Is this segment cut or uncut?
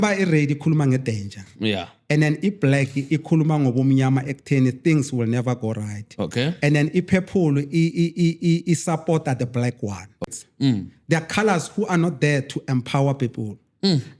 cut